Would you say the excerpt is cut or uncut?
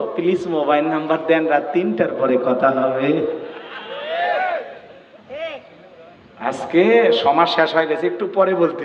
uncut